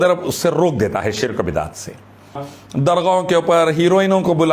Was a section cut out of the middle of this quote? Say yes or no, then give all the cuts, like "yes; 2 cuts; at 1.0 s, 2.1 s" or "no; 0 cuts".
yes; 1 cut; at 2.5 s